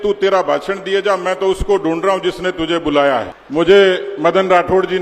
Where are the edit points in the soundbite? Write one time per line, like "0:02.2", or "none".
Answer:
0:03.4